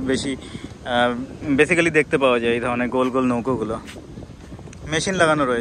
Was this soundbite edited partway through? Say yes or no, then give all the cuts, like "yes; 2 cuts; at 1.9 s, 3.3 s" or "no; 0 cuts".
no; 0 cuts